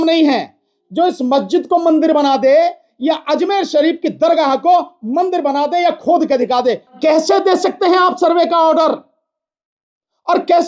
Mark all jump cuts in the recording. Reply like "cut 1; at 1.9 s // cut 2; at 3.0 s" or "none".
cut 1; at 6.9 s